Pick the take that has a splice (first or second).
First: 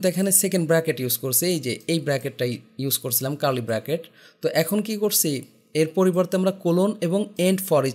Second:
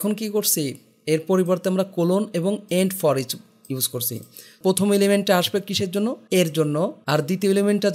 second